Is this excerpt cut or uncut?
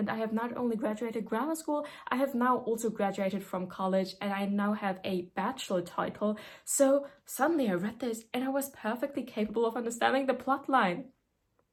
uncut